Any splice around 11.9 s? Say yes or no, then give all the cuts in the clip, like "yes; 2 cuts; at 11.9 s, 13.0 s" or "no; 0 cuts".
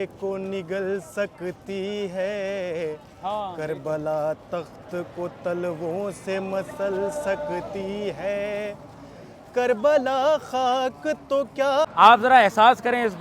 yes; 1 cut; at 11.9 s